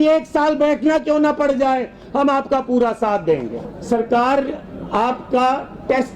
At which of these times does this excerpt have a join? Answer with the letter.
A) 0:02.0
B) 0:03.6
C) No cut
B